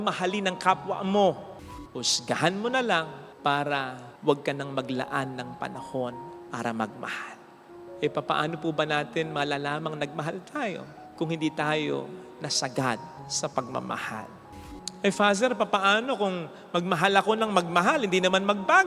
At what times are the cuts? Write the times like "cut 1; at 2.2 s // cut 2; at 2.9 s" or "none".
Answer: cut 1; at 1.7 s // cut 2; at 14.5 s